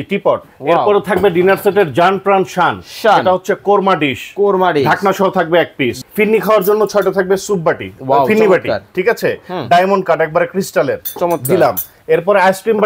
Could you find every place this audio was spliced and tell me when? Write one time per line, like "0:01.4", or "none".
0:06.0